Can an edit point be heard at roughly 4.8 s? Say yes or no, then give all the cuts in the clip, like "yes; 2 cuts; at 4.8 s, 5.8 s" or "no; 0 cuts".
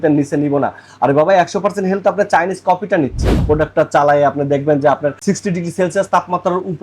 no; 1 cut; at 3.4 s